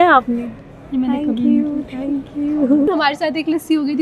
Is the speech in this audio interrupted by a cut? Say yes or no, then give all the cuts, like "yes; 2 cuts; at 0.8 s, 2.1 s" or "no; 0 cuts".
yes; 1 cut; at 2.9 s